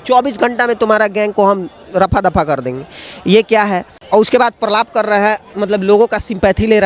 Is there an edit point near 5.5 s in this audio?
no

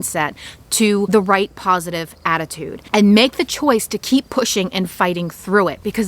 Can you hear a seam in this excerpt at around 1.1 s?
yes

